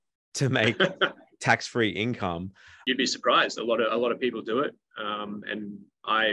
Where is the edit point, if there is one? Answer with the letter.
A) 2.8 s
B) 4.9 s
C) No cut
A